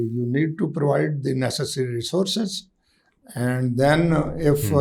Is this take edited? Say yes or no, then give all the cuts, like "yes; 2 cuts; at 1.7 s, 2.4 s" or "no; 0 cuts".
no; 0 cuts